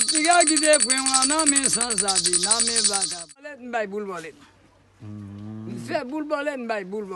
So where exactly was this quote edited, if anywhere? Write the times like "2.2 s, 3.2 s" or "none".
3.6 s